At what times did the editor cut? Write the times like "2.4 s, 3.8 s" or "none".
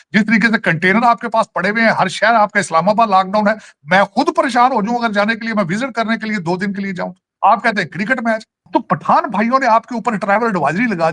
7.3 s, 8.7 s